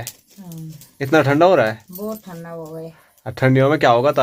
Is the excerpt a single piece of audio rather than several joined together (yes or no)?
yes